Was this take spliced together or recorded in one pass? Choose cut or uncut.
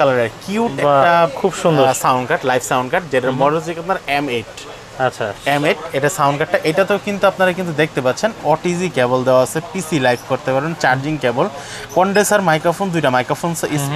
uncut